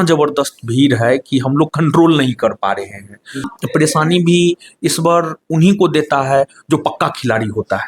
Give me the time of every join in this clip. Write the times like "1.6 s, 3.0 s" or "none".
3.6 s

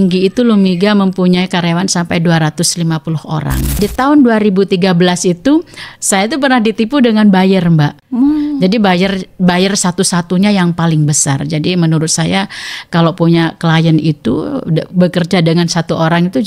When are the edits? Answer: 3.8 s, 8.0 s

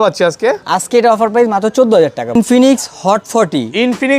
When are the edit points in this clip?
2.4 s

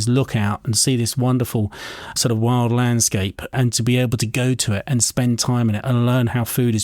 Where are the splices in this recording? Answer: 2.1 s, 3.5 s

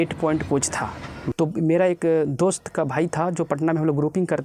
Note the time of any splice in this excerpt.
1.1 s

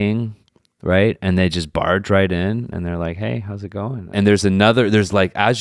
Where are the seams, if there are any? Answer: 4.0 s

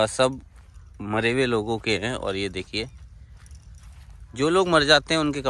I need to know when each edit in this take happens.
none

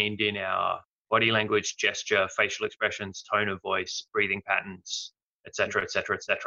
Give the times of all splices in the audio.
0.9 s

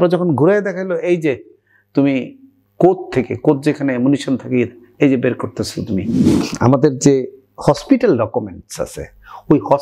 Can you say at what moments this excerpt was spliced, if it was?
6.4 s

